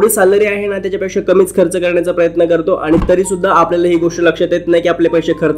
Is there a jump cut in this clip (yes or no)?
no